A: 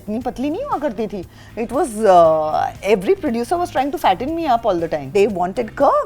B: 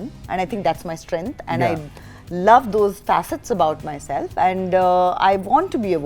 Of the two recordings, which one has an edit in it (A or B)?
A